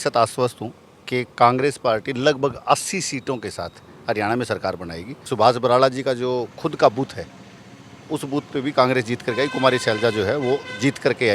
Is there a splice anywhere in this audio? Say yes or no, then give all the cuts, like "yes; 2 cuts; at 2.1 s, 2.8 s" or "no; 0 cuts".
yes; 1 cut; at 5.3 s